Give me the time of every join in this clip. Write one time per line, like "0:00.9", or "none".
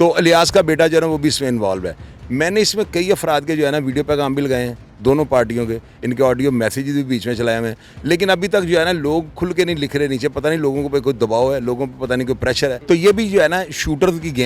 0:12.8